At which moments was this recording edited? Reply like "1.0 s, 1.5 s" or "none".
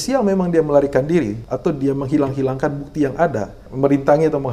1.4 s, 3.6 s